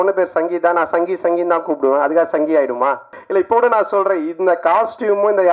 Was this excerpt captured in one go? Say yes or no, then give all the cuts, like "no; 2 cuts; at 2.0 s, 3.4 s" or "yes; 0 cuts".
no; 1 cut; at 3.1 s